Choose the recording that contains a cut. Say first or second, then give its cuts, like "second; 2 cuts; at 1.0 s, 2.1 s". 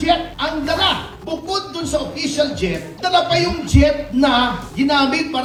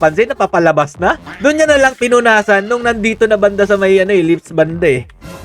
second; 1 cut; at 1.3 s